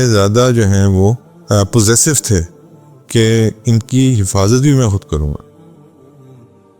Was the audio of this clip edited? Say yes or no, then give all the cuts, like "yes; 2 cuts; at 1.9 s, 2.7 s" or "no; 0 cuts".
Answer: yes; 2 cuts; at 1.3 s, 5.9 s